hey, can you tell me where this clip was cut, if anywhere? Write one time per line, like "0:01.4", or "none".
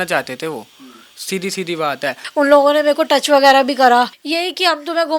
0:02.2
0:04.2